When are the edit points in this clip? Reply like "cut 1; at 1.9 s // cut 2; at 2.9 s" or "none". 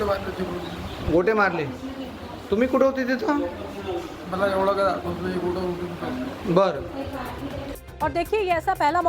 cut 1; at 5.4 s